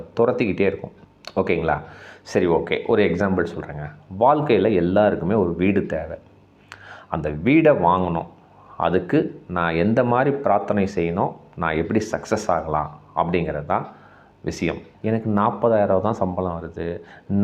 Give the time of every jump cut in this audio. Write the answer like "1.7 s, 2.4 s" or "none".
14.9 s